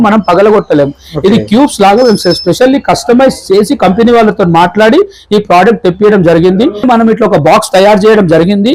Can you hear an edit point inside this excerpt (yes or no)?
yes